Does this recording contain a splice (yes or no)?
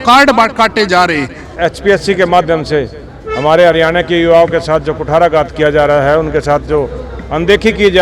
yes